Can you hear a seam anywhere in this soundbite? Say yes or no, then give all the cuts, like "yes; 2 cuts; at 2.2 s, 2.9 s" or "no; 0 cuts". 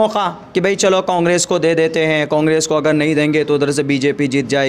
no; 0 cuts